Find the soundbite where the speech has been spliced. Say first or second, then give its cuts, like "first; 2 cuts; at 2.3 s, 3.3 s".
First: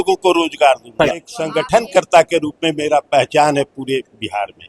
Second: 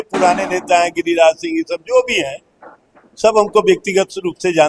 first; 1 cut; at 1.4 s